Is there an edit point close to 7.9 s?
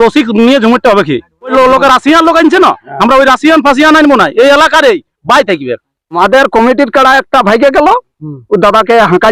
no; 2 cuts; at 1.5 s, 6.2 s

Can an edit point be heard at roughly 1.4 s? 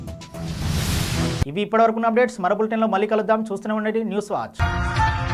no; 0 cuts

